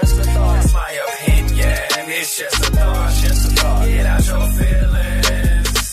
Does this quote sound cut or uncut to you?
uncut